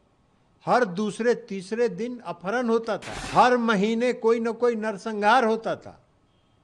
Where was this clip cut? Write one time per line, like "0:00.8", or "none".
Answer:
0:03.2